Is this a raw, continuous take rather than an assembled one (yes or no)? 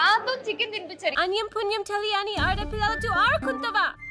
no